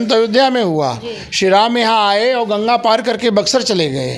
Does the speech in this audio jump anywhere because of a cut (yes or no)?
no